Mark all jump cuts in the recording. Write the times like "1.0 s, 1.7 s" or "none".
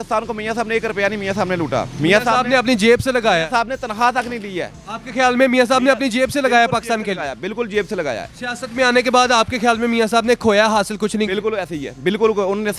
none